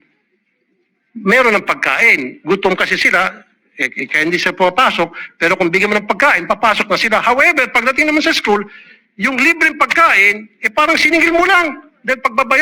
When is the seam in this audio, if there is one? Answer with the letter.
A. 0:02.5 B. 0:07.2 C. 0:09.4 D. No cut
D